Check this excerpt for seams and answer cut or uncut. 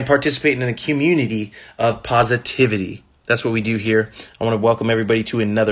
uncut